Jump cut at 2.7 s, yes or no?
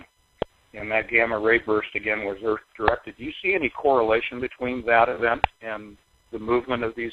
no